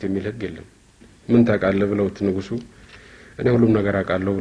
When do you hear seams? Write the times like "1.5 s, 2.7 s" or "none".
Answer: 1.1 s